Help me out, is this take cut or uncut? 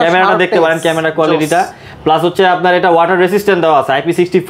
uncut